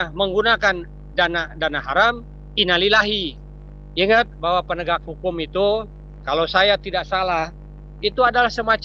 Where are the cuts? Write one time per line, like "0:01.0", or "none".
0:03.3